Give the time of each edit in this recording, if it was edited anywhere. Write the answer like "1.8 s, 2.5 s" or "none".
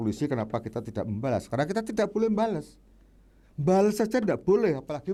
none